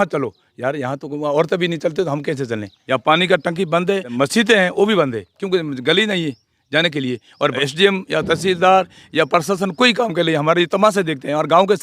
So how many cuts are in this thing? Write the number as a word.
three